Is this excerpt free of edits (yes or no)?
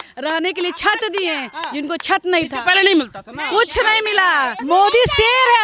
no